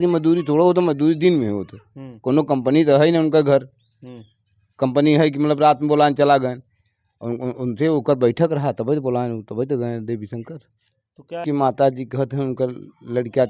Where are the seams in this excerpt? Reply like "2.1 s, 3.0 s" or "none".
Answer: 11.4 s